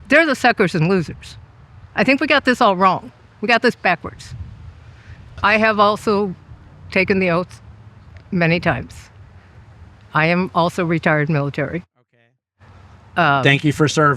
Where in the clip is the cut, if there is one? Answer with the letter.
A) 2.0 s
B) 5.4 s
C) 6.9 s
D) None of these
B